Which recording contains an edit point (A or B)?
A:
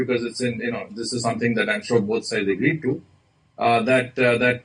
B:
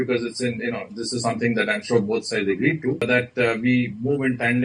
B